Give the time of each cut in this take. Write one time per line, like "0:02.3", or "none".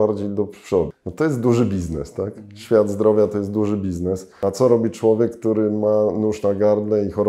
0:01.0
0:04.3